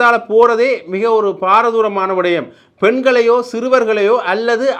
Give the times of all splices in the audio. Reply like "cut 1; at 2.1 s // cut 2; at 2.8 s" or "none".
none